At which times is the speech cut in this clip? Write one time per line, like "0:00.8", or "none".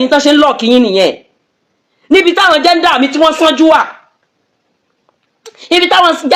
none